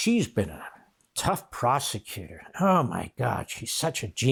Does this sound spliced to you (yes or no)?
no